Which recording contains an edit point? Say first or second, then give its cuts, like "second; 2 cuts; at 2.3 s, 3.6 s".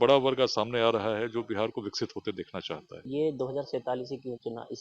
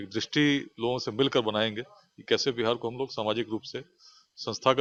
first; 1 cut; at 3.1 s